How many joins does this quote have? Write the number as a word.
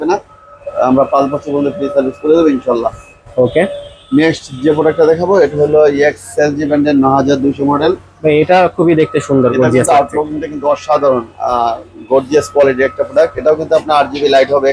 zero